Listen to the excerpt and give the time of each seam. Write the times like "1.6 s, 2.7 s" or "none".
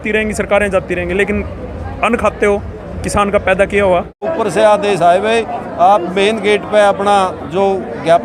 4.3 s